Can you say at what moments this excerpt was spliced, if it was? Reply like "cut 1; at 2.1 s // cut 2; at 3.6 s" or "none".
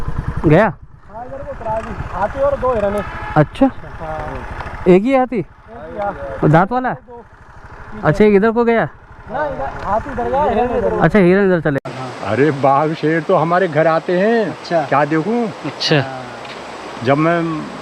cut 1; at 11.8 s